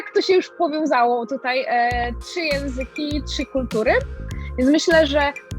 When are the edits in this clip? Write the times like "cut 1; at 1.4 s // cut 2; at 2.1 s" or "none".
cut 1; at 4.2 s